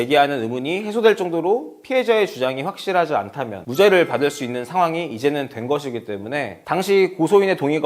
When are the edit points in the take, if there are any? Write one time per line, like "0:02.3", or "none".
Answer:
none